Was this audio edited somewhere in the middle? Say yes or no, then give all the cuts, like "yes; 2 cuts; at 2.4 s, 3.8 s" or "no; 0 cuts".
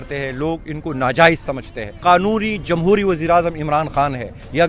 yes; 1 cut; at 1.9 s